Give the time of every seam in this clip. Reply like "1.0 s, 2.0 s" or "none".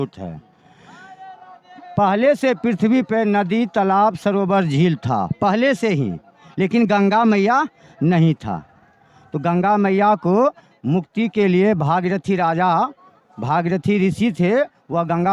none